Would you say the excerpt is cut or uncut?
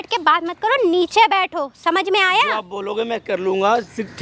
uncut